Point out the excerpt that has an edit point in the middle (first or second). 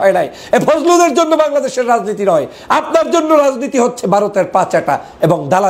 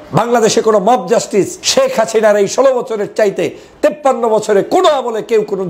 second